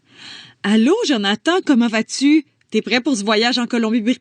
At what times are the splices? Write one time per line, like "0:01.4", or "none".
0:01.4